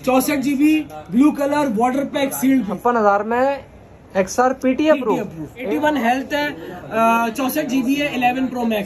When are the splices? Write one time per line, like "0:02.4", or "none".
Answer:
0:02.7
0:05.5